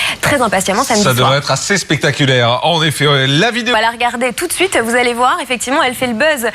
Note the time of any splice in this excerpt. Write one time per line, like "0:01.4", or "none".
0:02.9